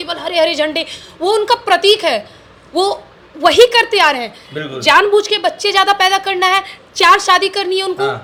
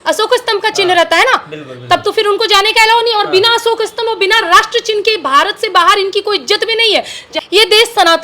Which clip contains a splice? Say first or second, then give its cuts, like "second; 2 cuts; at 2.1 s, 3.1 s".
second; 1 cut; at 7.3 s